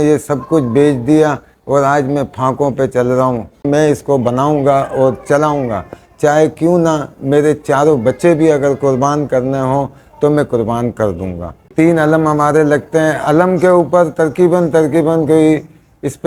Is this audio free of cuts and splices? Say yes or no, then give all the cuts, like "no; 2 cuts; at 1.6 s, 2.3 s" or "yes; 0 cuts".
no; 2 cuts; at 3.6 s, 11.6 s